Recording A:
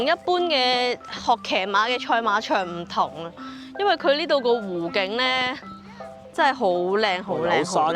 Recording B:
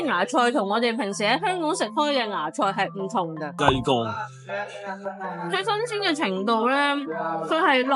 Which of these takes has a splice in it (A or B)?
B